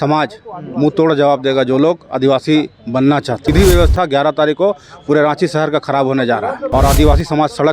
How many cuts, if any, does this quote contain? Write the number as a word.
two